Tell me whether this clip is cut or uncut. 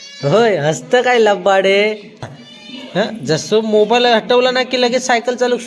cut